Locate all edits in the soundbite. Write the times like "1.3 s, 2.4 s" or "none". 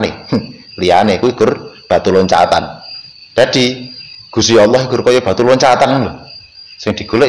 none